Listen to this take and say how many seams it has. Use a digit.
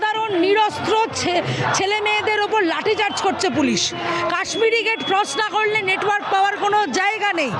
0